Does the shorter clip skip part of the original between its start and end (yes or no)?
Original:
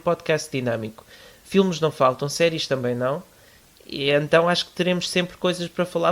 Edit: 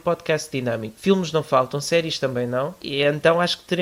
yes